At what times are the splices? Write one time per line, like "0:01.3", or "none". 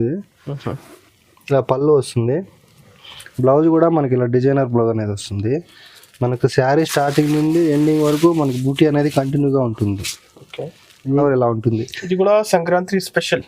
0:11.2